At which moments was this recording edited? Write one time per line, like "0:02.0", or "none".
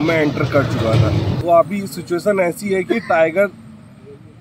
none